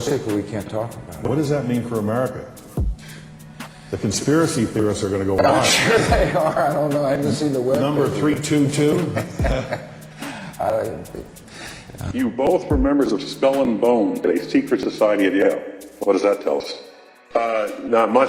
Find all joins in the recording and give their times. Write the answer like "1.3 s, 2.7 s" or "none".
none